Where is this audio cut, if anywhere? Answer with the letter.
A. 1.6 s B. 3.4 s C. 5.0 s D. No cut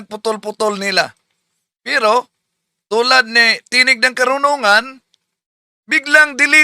C